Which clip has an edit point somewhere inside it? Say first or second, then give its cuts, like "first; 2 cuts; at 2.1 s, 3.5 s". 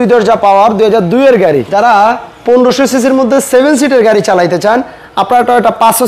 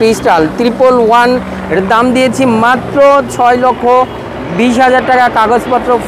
first; 1 cut; at 1.7 s